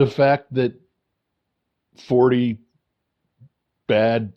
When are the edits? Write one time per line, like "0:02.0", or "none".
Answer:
none